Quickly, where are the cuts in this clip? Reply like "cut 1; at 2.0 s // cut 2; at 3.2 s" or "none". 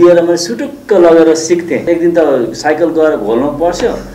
cut 1; at 1.8 s